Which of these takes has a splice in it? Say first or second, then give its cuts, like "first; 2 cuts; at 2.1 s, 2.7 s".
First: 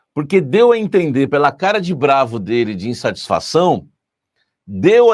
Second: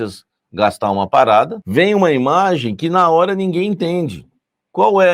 second; 1 cut; at 1.6 s